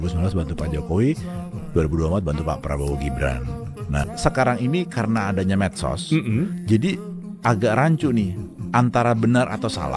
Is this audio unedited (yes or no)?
no